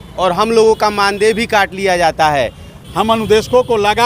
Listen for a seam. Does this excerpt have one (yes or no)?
yes